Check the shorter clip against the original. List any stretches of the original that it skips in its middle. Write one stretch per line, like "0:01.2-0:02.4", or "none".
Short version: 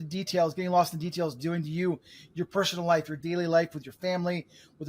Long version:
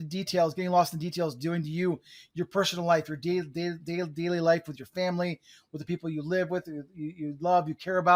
0:03.2-0:04.1